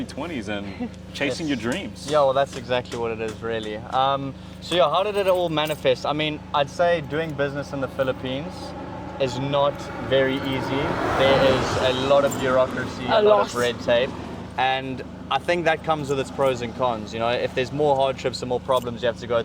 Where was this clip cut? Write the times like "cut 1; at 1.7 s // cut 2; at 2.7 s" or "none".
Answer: none